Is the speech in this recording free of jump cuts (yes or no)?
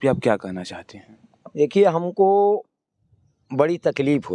yes